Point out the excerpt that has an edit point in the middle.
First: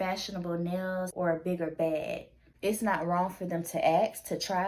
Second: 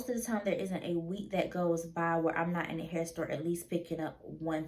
first; 2 cuts; at 1.1 s, 2.4 s

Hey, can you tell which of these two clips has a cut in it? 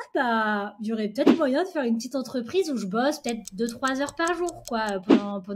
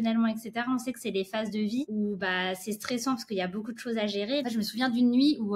second; 2 cuts; at 1.9 s, 4.4 s

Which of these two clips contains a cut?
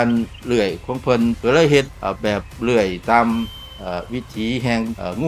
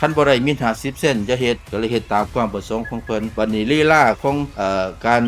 second; 2 cuts; at 1.6 s, 3.3 s

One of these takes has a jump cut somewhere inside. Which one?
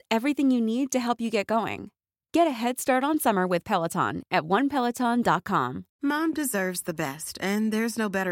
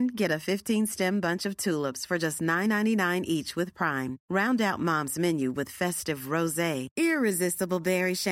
first; 1 cut; at 5.9 s

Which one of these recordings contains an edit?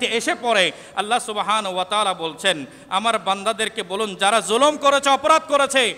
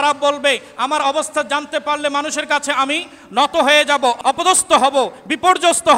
second; 1 cut; at 4.2 s

